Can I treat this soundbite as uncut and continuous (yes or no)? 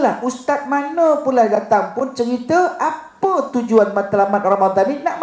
yes